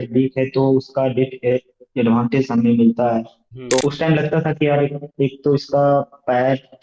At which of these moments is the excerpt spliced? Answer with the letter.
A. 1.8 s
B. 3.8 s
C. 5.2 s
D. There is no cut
B